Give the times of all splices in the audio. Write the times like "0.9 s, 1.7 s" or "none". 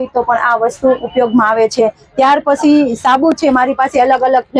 none